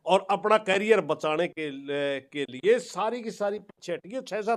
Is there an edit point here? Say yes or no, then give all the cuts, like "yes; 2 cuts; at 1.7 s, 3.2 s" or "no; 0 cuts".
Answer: no; 0 cuts